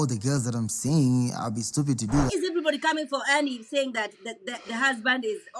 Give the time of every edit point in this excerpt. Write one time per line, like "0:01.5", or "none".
0:02.3